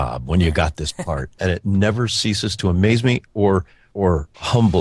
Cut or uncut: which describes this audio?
cut